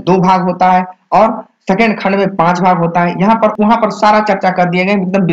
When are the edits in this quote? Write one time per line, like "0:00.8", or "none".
0:03.5